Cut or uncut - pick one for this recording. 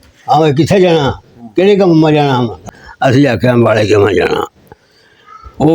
cut